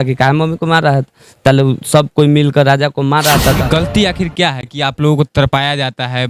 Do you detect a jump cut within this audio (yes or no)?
yes